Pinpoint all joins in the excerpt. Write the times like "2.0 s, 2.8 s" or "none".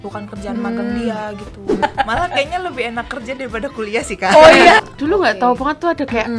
1.8 s, 4.8 s

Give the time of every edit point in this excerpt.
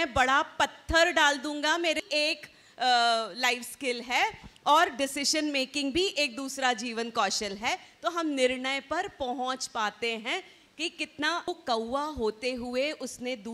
2.0 s, 11.5 s

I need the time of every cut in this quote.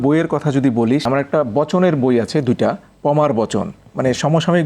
1.0 s

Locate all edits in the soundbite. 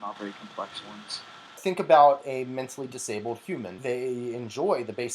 1.6 s, 3.8 s

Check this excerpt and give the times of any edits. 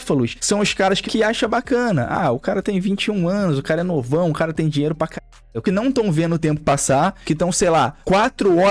1.0 s, 5.6 s

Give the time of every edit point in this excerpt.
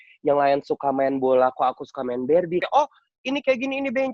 2.6 s

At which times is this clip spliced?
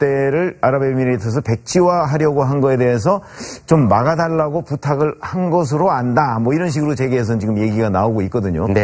7.1 s

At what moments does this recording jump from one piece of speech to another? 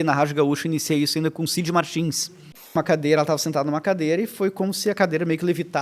2.7 s

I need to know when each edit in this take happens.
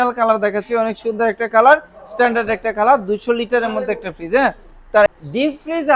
5.1 s

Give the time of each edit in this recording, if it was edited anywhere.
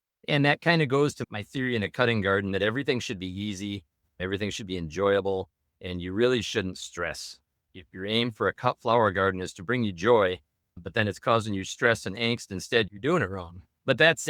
1.2 s

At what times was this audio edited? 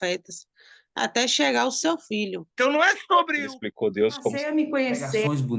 2.4 s

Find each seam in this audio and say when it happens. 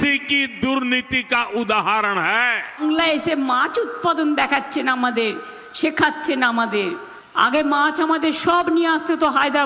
2.8 s

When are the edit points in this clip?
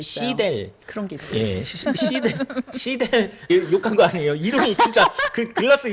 3.5 s

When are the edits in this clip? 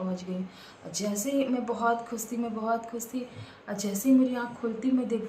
none

